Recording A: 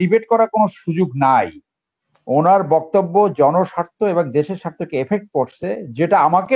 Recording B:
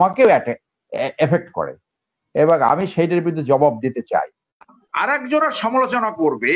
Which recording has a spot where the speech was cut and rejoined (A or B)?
B